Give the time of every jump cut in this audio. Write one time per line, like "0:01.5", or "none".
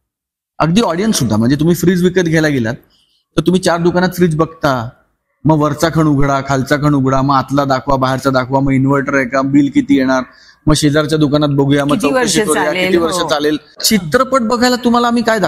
0:13.7